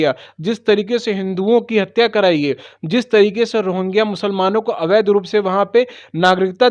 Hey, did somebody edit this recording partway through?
no; 0 cuts

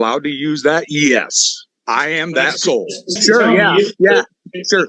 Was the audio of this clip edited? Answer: yes; 1 cut; at 3.2 s

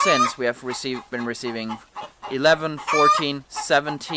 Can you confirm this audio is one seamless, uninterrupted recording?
yes; 0 cuts

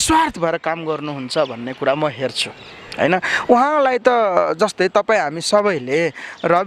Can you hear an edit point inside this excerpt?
no; 0 cuts

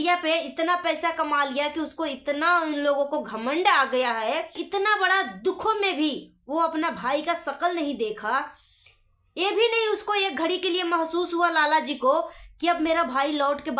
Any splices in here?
yes; 1 cut; at 4.6 s

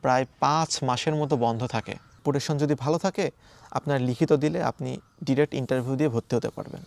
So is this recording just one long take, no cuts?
no; 1 cut; at 2.2 s

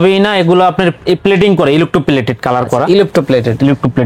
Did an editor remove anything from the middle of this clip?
no; 0 cuts

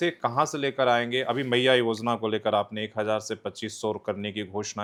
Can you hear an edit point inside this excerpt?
no; 0 cuts

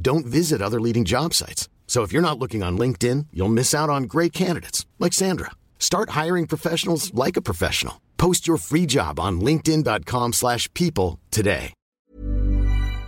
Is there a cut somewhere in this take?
yes; 1 cut; at 12.1 s

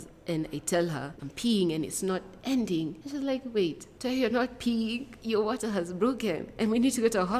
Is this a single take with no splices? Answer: no; 4 cuts; at 1.2 s, 3.0 s, 3.9 s, 5.1 s

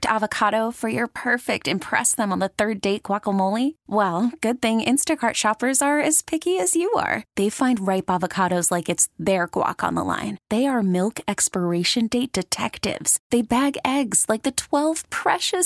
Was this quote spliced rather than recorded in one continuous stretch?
no; 0 cuts

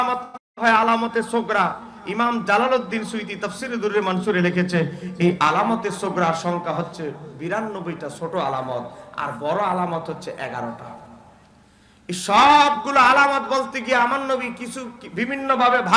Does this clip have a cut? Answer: no; 0 cuts

